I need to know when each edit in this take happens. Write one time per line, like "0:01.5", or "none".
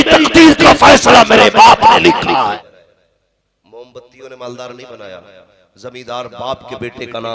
0:02.5